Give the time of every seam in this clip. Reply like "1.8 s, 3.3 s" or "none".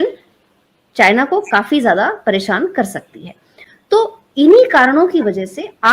none